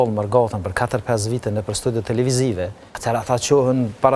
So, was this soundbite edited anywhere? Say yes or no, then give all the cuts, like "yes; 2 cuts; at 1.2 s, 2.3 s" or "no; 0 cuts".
yes; 1 cut; at 2.9 s